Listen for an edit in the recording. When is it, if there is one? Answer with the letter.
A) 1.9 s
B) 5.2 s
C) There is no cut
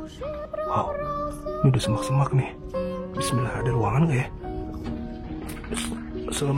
C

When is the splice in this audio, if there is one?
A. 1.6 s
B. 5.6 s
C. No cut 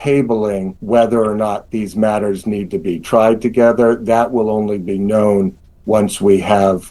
C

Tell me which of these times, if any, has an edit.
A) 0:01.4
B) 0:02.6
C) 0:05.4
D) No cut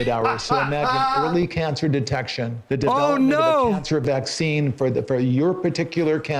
B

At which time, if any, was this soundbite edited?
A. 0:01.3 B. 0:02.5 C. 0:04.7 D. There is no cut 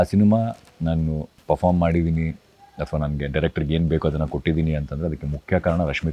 A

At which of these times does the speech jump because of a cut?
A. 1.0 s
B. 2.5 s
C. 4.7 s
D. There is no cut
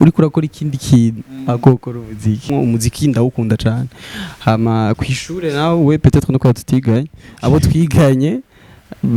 B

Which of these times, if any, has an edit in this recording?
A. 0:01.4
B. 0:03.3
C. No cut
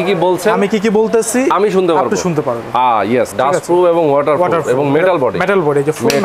B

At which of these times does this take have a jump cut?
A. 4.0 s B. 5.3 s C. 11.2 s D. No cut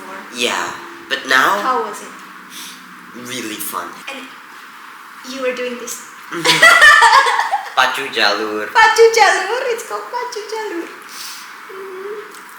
A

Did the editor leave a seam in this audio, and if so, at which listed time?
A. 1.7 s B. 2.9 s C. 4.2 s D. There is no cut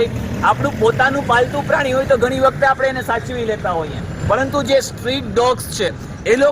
D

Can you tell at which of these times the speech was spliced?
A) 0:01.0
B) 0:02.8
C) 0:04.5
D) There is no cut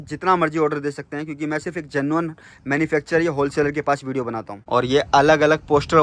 C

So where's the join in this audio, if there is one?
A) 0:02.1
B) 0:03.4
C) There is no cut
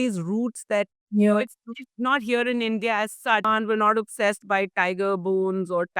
B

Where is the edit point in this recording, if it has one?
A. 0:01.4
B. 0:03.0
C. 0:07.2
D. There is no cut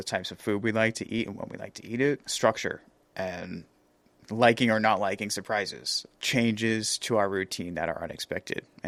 D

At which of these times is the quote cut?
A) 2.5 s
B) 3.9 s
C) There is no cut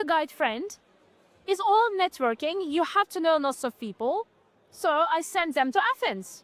C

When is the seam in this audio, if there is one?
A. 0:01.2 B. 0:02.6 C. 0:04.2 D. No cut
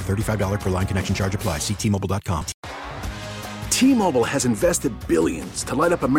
B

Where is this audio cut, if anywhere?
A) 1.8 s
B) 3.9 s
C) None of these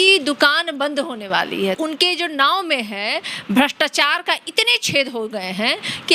A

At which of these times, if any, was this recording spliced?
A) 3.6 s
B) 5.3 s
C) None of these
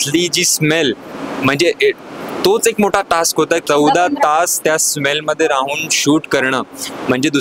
A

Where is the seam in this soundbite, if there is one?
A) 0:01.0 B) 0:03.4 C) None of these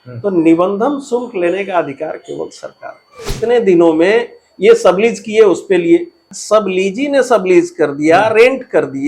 B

